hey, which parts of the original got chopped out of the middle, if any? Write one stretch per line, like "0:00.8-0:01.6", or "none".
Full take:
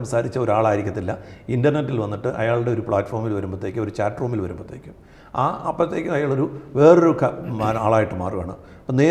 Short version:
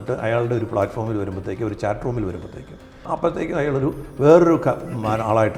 0:05.2-0:05.6